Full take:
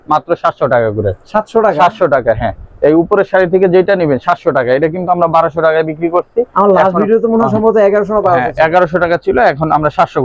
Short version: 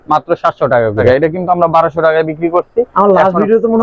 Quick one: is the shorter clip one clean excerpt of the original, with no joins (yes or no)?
no